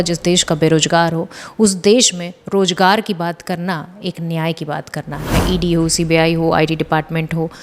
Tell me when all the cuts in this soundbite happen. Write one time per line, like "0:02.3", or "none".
0:05.3